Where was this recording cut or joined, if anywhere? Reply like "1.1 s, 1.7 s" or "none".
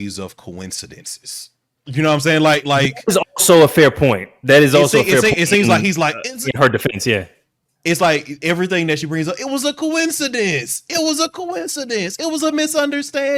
none